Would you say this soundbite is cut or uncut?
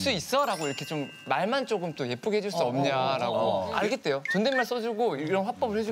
cut